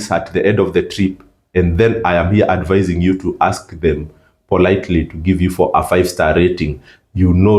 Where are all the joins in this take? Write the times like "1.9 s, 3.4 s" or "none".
none